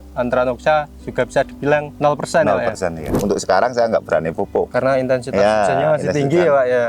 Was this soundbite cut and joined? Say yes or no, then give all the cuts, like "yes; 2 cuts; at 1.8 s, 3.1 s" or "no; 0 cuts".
yes; 3 cuts; at 1.9 s, 3.1 s, 4.7 s